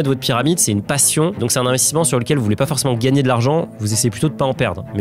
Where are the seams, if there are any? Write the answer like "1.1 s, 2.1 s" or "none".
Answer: none